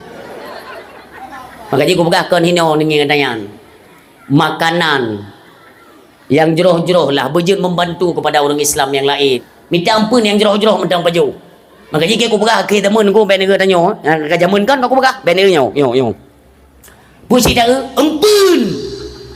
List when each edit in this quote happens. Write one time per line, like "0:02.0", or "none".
0:09.5